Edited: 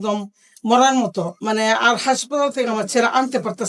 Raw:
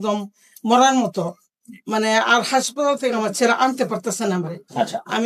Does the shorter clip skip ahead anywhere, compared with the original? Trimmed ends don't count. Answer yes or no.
yes